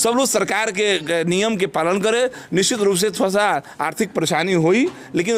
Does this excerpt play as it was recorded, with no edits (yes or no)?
yes